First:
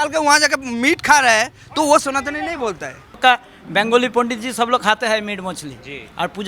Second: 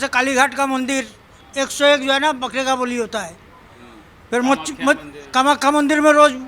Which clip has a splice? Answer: first; 1 cut; at 3.2 s

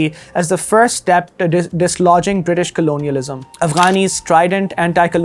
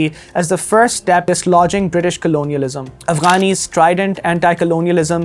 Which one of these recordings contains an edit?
second; 1 cut; at 1.2 s

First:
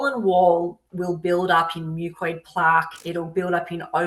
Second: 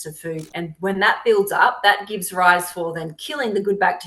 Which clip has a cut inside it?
first; 1 cut; at 3.0 s

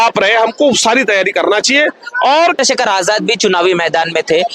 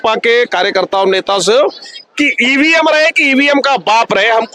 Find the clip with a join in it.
first; 1 cut; at 2.6 s

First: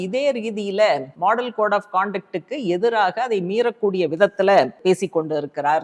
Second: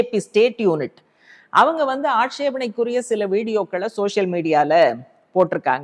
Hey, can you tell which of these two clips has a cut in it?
first; 2 cuts; at 1.1 s, 4.8 s

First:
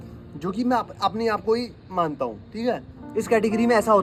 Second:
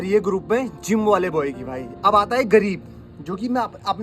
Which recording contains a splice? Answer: second; 1 cut; at 1.8 s

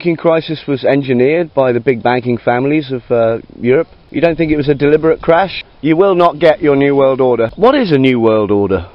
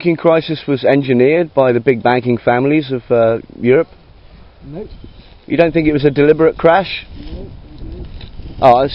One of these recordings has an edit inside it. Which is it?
first; 3 cuts; at 4.0 s, 5.7 s, 7.5 s

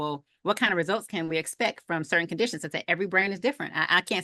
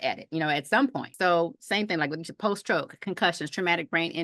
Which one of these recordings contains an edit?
second; 1 cut; at 1.1 s

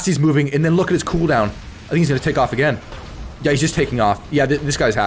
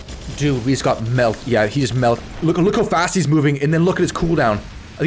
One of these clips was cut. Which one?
second; 1 cut; at 2.2 s

